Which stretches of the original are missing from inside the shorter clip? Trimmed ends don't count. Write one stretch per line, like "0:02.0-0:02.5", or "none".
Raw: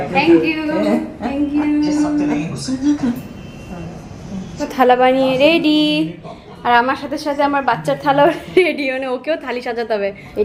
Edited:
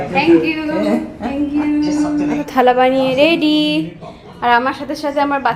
0:02.4-0:04.7